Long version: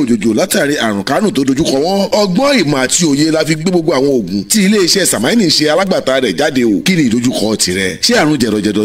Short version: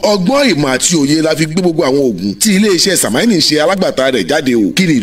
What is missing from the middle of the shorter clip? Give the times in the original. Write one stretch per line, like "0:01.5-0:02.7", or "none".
none